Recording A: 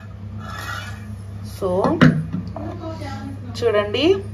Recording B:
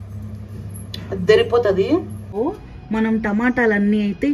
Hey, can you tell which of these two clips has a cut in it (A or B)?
B